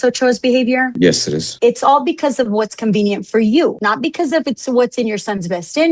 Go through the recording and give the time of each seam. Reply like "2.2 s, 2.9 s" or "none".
1.5 s